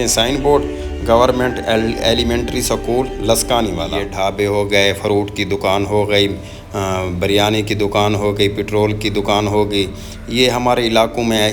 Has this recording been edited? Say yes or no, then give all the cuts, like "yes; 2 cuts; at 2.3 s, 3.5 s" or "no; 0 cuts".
yes; 1 cut; at 4.0 s